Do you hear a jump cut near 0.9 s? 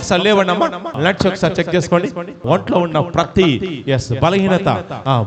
yes; 2 cuts; at 0.9 s, 2.4 s

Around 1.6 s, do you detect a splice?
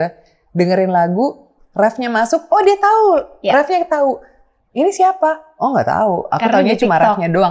no; 0 cuts

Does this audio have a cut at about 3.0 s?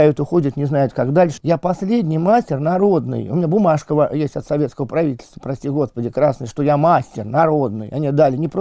no; 1 cut; at 1.3 s

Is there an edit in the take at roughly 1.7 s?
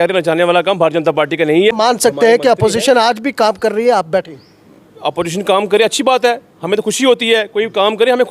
yes; 1 cut; at 1.7 s

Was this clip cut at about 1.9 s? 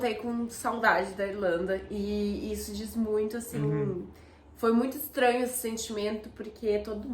no; 0 cuts

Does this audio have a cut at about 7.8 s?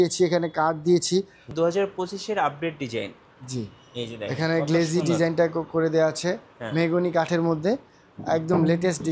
no; 1 cut; at 1.5 s

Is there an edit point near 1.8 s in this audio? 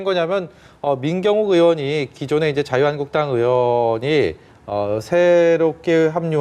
no; 0 cuts

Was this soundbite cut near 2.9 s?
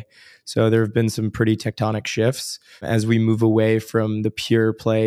yes; 1 cut; at 2.9 s

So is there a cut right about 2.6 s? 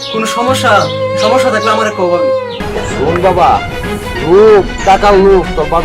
yes; 1 cut; at 2.6 s

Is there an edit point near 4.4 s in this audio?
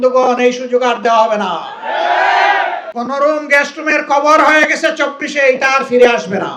no; 1 cut; at 2.9 s

